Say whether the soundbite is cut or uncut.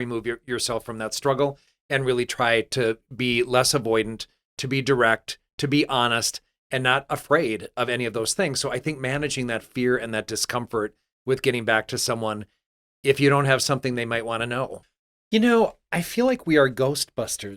cut